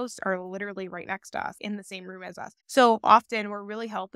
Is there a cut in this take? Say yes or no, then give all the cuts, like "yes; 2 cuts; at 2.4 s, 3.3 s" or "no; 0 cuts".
no; 0 cuts